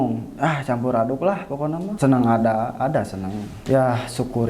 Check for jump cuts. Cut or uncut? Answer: cut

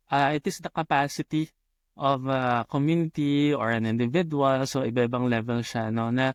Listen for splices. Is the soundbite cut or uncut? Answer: uncut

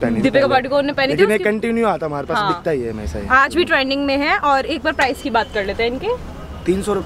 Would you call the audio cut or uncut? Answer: uncut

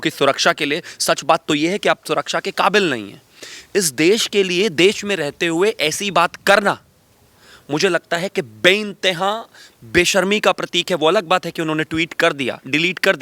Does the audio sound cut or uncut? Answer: uncut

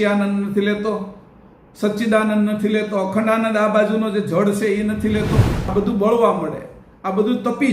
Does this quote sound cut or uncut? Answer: cut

